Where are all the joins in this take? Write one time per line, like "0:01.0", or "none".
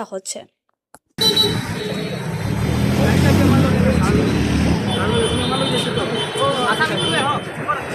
0:01.2